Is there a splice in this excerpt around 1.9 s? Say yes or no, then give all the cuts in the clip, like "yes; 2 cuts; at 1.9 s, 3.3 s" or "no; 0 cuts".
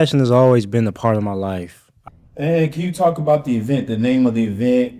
yes; 1 cut; at 1.9 s